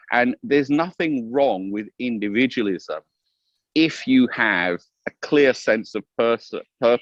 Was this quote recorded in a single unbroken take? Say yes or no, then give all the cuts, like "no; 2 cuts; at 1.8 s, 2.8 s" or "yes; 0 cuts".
yes; 0 cuts